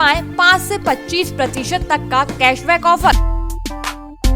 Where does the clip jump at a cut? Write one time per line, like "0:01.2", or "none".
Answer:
0:03.2